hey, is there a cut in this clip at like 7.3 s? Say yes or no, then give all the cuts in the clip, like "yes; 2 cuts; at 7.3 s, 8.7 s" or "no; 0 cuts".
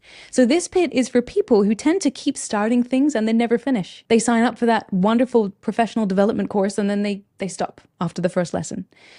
no; 1 cut; at 3.9 s